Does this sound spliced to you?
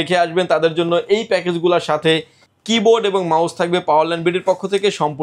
no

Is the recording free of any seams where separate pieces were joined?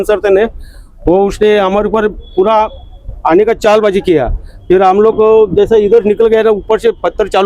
yes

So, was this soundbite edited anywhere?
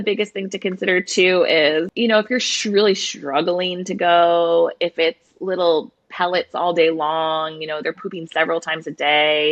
no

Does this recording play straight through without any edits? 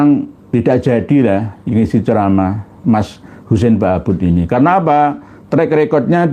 yes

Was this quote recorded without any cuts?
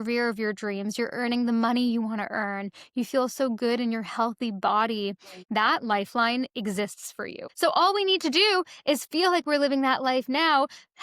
no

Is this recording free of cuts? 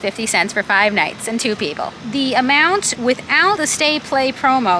no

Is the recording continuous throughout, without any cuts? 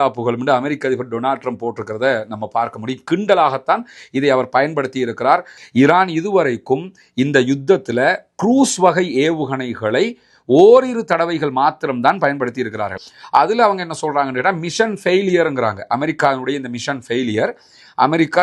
no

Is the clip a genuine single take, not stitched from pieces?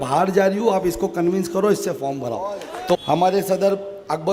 no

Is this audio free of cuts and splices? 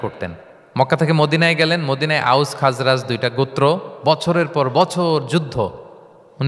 yes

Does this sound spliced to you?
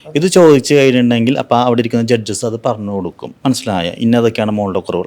yes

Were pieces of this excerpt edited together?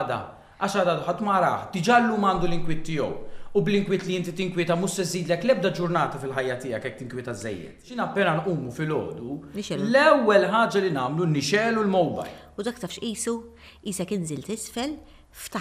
yes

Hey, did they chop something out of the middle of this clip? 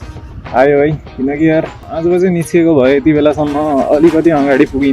yes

